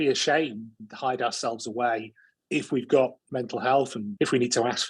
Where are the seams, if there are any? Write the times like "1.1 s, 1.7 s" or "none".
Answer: 3.3 s, 4.0 s